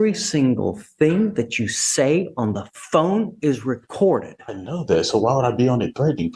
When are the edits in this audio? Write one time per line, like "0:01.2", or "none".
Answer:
none